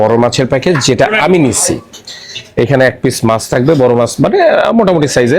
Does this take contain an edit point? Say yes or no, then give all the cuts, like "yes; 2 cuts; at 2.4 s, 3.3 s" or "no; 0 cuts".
no; 0 cuts